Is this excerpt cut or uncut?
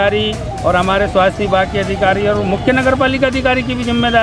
uncut